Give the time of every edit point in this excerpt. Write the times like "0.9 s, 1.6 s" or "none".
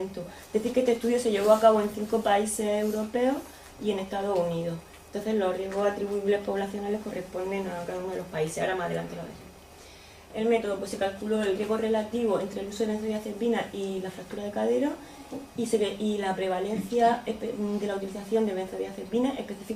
none